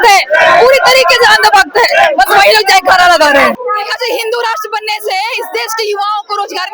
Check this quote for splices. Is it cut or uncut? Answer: cut